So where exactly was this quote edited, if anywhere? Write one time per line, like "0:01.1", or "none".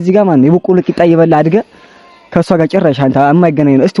none